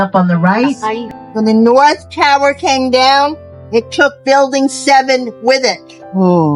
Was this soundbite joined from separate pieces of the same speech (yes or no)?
yes